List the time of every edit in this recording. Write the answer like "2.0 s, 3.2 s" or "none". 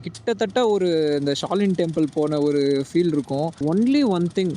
3.6 s